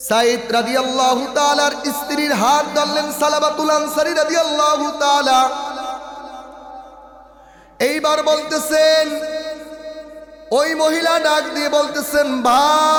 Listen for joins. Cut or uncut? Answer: uncut